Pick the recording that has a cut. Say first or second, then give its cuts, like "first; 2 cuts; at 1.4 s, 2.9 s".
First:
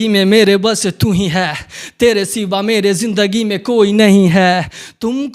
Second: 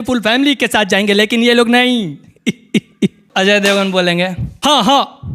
second; 2 cuts; at 3.2 s, 4.5 s